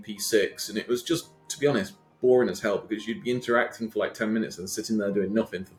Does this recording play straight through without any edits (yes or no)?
yes